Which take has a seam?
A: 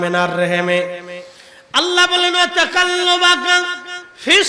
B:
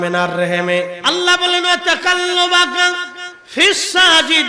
B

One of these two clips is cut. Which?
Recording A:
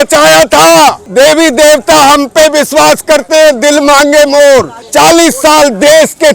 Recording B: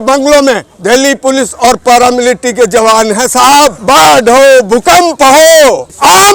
A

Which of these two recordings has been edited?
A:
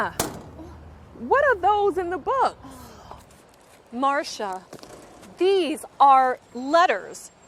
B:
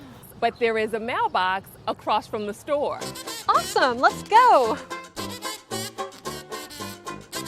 B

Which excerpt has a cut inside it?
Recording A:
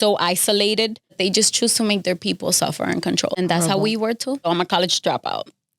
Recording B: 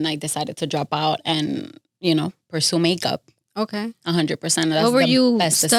A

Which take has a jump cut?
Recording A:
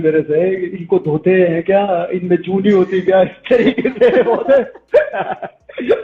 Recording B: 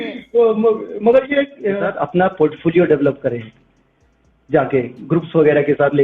B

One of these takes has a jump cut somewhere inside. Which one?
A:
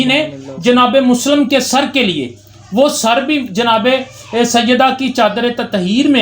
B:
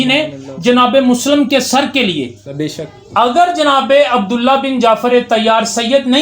B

